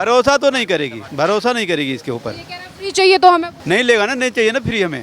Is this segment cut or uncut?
cut